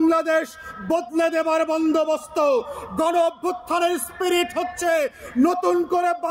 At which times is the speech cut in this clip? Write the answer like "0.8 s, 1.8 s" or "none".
none

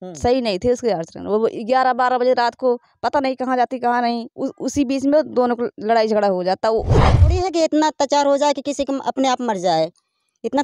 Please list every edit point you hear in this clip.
7.1 s

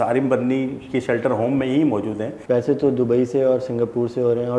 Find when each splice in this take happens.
2.3 s

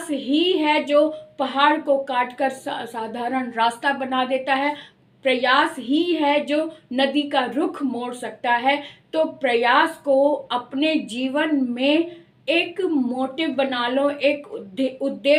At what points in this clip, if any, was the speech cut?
none

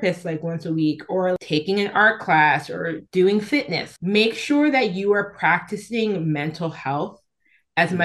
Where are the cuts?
1.4 s, 3.0 s, 3.8 s

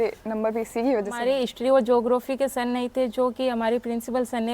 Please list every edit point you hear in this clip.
1.2 s

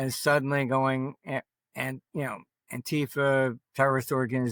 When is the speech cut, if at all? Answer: none

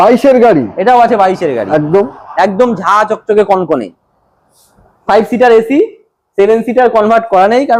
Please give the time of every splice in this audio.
none

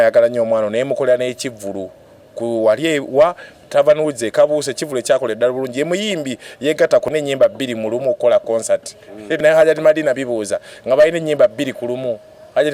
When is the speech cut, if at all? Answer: 7.1 s, 9.4 s

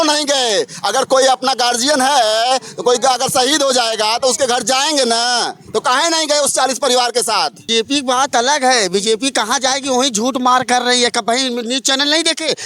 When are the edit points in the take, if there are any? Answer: 7.6 s

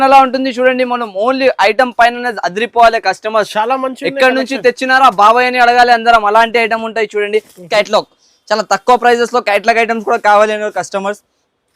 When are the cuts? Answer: 7.7 s

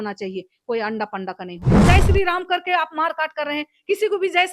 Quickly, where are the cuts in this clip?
1.8 s

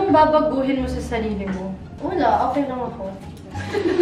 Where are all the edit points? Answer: 1.9 s

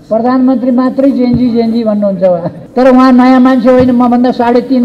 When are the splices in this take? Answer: 2.6 s

